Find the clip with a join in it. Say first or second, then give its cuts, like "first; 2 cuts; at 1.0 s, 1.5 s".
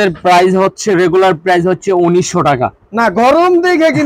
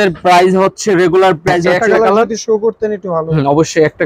second; 1 cut; at 1.8 s